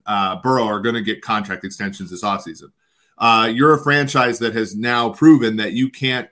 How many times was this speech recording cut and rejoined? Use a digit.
0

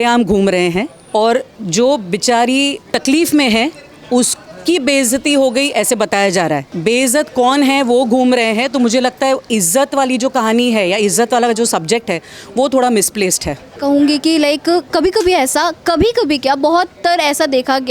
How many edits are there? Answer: 0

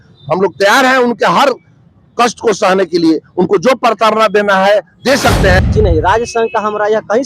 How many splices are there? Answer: 1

